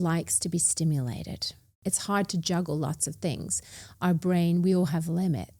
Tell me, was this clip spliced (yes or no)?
yes